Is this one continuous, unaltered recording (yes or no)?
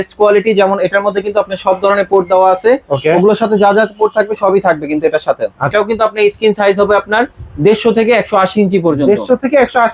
no